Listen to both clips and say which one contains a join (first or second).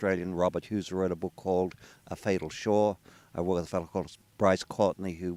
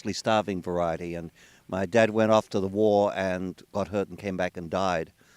second